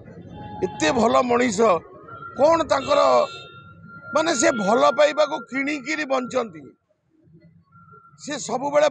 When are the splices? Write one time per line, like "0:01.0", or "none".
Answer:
none